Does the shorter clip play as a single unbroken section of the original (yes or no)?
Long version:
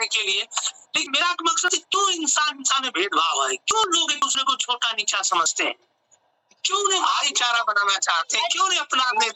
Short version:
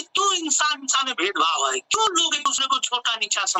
yes